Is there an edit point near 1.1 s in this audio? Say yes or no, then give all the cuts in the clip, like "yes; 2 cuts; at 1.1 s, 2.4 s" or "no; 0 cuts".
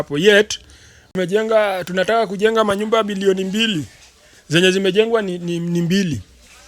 yes; 1 cut; at 1.1 s